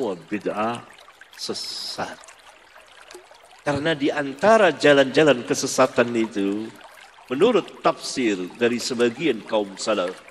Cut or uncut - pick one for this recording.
cut